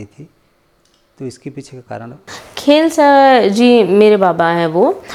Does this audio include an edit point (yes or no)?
no